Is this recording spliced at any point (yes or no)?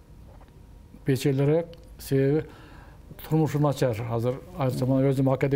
no